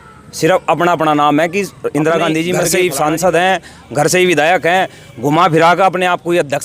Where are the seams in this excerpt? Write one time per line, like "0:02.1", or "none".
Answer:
0:02.7